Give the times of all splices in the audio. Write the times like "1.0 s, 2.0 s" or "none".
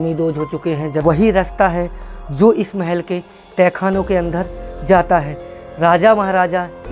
1.0 s